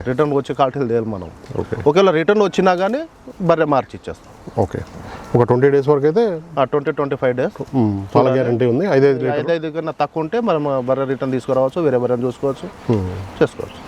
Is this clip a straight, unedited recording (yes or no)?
yes